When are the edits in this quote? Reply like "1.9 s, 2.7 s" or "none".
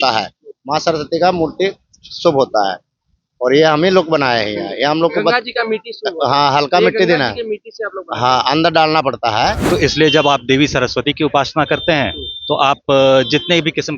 9.6 s